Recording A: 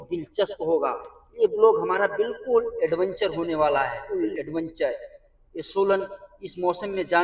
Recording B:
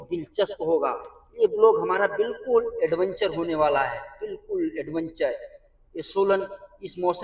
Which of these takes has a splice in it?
A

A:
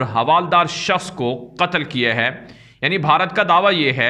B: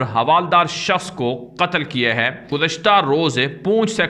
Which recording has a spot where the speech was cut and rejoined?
B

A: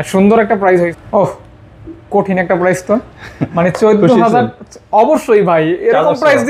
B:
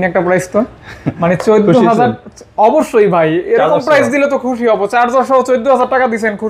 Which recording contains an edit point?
A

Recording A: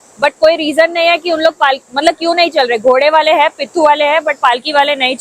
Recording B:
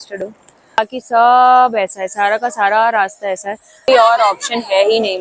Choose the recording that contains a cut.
B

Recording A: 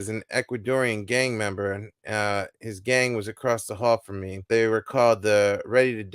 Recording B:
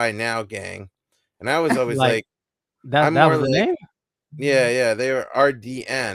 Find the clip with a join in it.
A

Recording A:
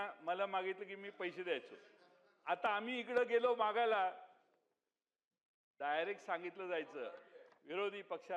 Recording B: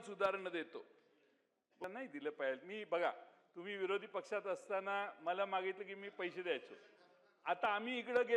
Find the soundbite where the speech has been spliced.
B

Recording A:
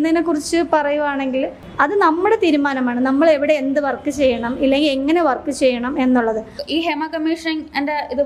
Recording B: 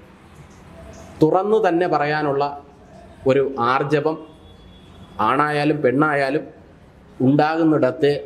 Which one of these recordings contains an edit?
A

